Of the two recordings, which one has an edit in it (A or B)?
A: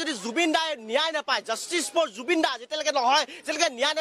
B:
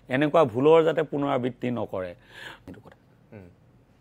B